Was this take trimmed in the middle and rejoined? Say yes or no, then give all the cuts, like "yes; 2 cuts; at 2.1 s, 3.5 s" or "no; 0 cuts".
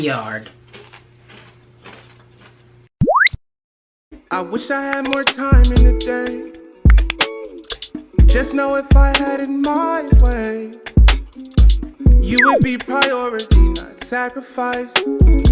yes; 1 cut; at 2.9 s